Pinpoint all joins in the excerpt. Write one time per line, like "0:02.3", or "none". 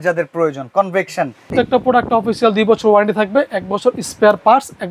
0:01.5